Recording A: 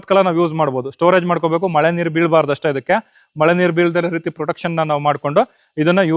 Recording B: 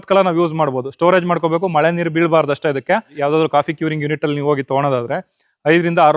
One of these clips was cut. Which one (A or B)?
B